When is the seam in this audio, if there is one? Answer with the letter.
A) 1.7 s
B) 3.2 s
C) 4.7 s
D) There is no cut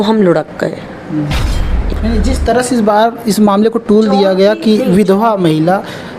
A